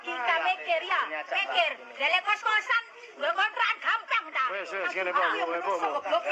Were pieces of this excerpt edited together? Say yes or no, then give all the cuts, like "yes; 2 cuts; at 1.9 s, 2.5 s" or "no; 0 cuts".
yes; 1 cut; at 5.3 s